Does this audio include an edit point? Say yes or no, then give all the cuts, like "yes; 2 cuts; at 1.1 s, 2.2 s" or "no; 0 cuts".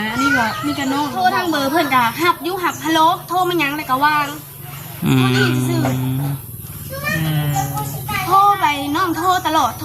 yes; 1 cut; at 1.2 s